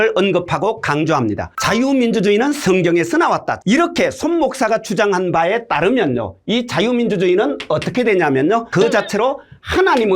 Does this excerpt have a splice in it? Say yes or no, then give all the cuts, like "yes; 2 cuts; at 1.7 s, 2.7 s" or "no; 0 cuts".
yes; 1 cut; at 3.6 s